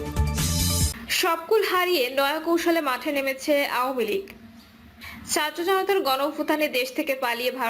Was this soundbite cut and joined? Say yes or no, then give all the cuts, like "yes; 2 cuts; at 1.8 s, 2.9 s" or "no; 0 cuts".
yes; 1 cut; at 1.0 s